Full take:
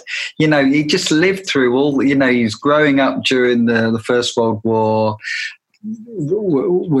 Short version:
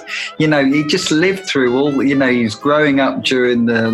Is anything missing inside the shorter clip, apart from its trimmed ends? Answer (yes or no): no